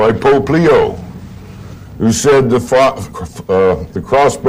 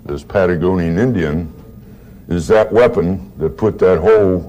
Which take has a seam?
first; 1 cut; at 1.6 s

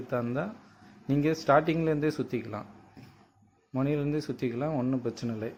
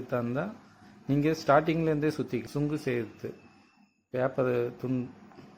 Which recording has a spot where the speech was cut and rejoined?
second; 1 cut; at 2.5 s

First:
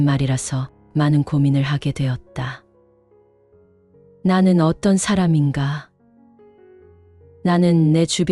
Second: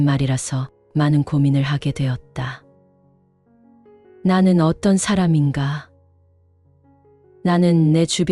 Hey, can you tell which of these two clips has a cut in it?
second; 2 cuts; at 2.6 s, 4.1 s

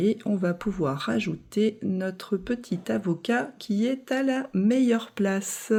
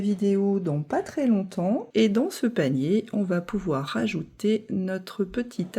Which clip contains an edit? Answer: second; 1 cut; at 1.9 s

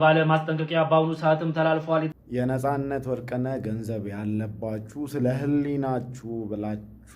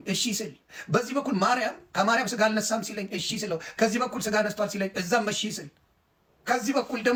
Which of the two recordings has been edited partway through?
first; 1 cut; at 2.1 s

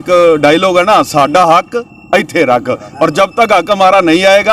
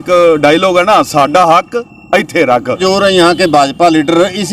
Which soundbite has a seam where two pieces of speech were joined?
second; 1 cut; at 2.8 s

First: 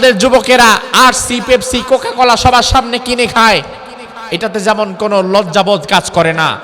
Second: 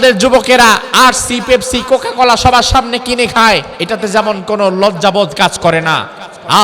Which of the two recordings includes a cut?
second; 1 cut; at 3.7 s

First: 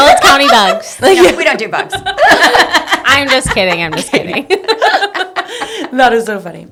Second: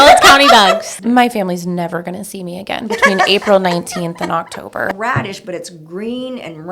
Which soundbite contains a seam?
second; 2 cuts; at 0.9 s, 4.9 s

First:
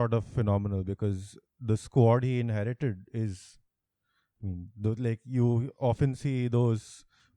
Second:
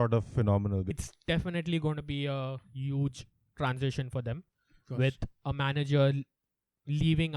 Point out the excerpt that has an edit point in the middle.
second; 1 cut; at 1.0 s

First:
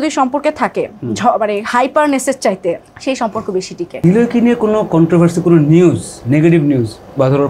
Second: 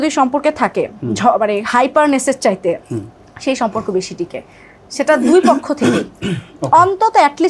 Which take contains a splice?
first; 2 cuts; at 2.9 s, 3.9 s

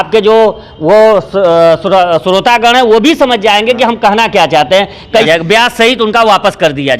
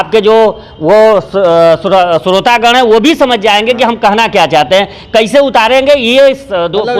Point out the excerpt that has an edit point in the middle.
first; 1 cut; at 5.3 s

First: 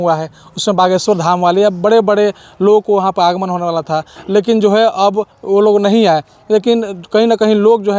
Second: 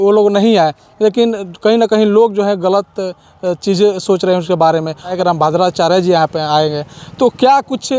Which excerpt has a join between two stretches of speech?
second; 1 cut; at 5.1 s

